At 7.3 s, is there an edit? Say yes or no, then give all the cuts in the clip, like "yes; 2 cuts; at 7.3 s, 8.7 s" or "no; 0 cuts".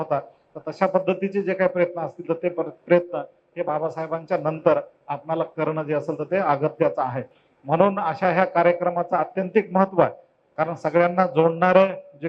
no; 0 cuts